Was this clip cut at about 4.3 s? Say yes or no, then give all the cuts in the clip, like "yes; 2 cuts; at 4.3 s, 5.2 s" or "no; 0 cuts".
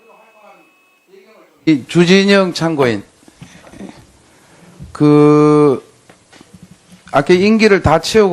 no; 1 cut; at 0.9 s